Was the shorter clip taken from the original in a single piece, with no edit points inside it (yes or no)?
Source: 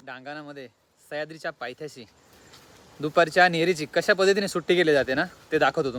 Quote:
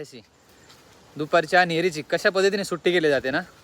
yes